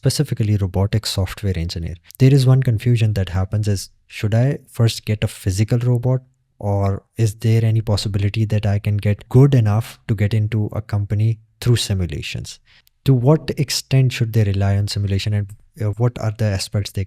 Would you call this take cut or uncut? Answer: uncut